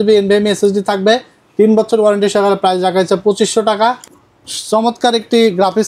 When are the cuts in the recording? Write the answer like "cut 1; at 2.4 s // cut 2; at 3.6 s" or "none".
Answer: cut 1; at 4.0 s